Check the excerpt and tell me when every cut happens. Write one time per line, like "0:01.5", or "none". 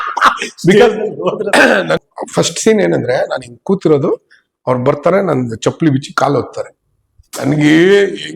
0:02.0